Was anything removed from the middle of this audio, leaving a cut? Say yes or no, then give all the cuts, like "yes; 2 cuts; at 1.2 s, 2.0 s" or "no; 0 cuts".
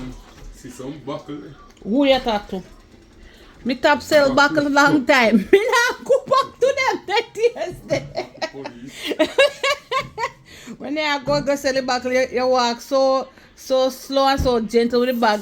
no; 0 cuts